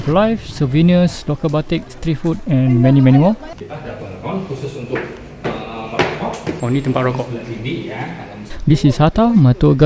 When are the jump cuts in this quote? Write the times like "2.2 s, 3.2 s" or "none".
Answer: 3.5 s, 8.4 s